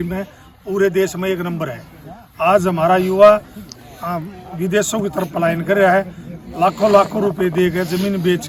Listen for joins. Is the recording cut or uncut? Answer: uncut